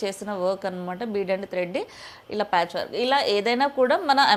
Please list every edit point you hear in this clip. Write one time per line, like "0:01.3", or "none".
none